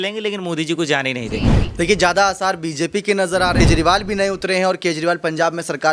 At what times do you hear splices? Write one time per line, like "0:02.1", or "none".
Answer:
0:01.6
0:03.6